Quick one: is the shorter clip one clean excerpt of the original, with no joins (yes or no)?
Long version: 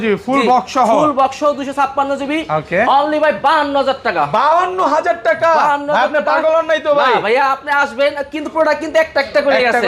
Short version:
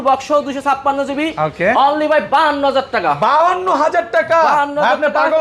yes